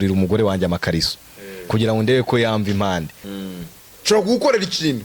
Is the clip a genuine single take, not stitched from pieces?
no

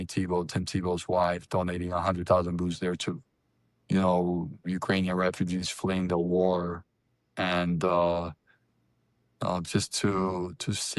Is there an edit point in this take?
no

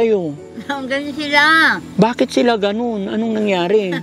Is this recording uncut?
yes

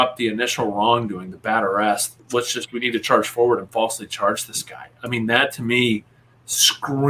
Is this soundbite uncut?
no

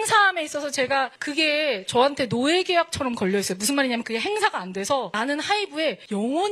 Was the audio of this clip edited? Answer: no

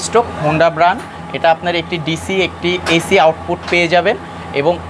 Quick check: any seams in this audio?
no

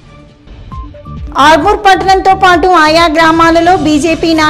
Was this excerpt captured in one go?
no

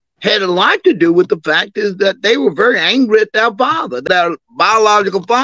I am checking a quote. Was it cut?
yes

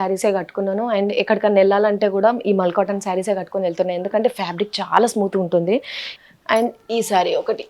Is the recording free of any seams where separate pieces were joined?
no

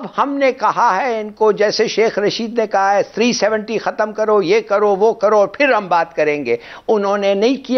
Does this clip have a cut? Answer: no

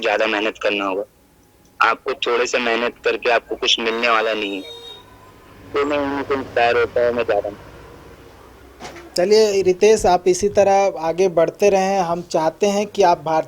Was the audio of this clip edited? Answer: no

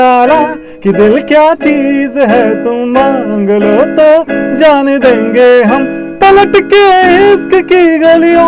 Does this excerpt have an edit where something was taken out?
no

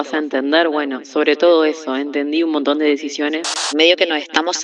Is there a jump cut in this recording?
yes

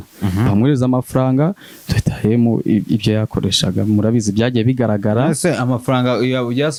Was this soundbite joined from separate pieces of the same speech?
no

